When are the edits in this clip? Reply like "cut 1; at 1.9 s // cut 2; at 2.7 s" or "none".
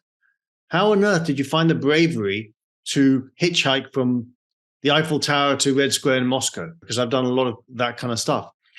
cut 1; at 6.8 s